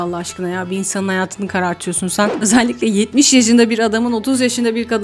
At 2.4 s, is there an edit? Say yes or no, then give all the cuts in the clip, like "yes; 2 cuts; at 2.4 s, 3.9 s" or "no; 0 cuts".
yes; 1 cut; at 2.4 s